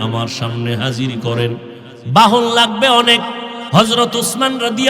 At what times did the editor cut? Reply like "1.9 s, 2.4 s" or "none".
3.5 s